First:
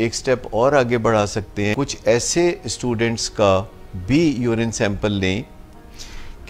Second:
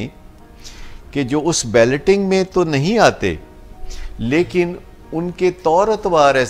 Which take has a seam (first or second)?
first